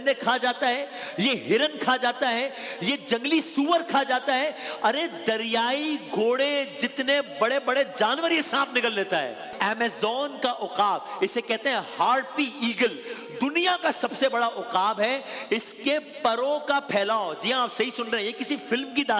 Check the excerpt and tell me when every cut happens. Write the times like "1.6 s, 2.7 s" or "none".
9.5 s